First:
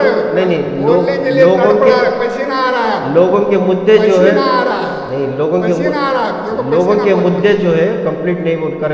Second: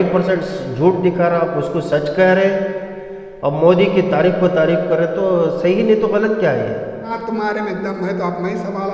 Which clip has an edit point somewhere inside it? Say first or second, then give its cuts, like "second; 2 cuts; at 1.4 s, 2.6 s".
second; 1 cut; at 7.1 s